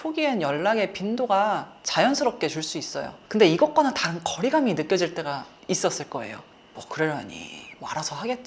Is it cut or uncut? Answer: cut